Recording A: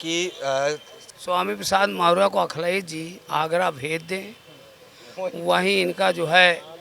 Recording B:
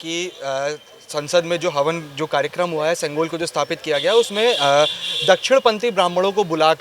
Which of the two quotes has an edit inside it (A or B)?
A